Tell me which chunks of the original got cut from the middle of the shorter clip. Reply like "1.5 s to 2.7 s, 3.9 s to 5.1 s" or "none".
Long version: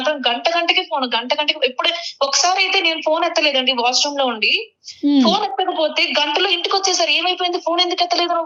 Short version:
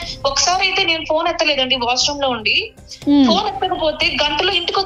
none